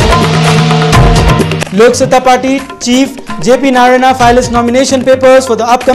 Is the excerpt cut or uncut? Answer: cut